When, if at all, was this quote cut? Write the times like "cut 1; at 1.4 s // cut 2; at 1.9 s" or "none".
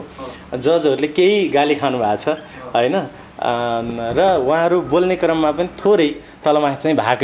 none

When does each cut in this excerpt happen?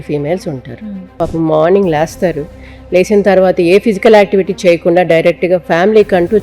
cut 1; at 1.1 s

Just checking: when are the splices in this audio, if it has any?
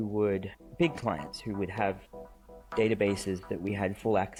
none

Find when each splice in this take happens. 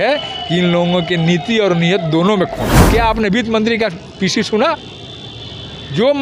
cut 1; at 2.8 s

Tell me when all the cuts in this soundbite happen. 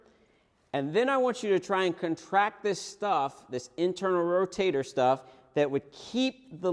none

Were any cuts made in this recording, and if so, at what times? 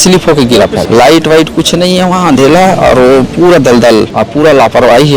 cut 1; at 0.8 s // cut 2; at 4.2 s

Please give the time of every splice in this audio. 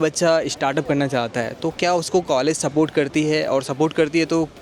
none

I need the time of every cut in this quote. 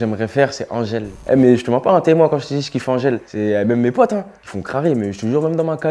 cut 1; at 1.1 s

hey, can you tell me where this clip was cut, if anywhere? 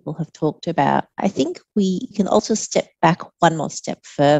cut 1; at 1.1 s // cut 2; at 2.4 s

